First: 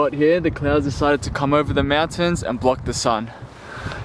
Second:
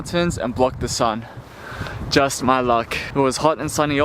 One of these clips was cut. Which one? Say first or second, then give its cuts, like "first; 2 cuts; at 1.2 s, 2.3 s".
second; 1 cut; at 3.0 s